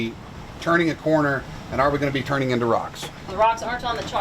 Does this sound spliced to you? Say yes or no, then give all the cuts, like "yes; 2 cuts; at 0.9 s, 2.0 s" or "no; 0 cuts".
yes; 1 cut; at 3.2 s